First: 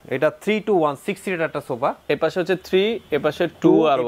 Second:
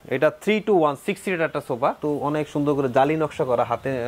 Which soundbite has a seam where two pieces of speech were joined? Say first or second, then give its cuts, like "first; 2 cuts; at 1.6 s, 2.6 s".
second; 1 cut; at 2.0 s